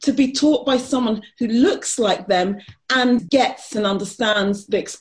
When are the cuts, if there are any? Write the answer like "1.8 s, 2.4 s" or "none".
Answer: 3.2 s